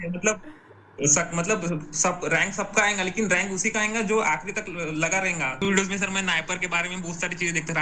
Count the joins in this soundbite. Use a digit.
1